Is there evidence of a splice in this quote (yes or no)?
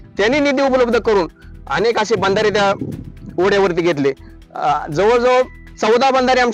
no